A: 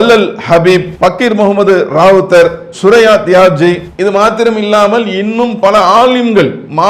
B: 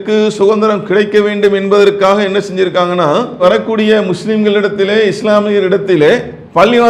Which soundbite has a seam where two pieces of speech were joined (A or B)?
A